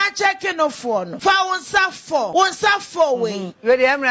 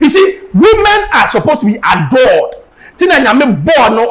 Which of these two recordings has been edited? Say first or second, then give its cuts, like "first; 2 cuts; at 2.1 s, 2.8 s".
first; 2 cuts; at 1.1 s, 2.3 s